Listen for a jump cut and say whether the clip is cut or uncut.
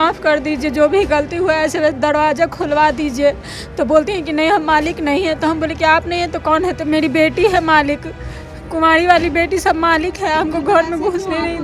uncut